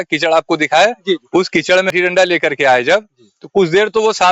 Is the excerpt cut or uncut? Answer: cut